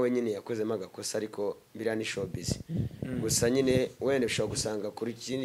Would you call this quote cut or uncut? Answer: uncut